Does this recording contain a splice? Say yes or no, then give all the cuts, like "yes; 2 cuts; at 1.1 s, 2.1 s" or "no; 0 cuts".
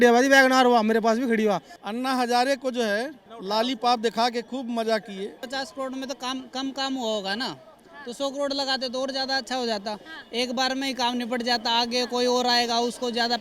yes; 2 cuts; at 1.8 s, 5.3 s